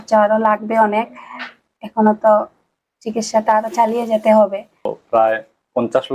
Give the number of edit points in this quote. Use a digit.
1